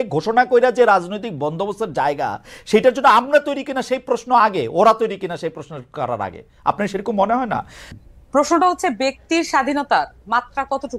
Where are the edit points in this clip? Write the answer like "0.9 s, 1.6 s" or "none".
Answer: 7.8 s